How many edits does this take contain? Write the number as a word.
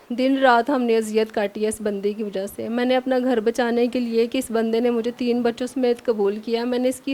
zero